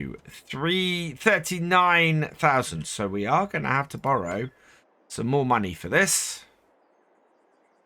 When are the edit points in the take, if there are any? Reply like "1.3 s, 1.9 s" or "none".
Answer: none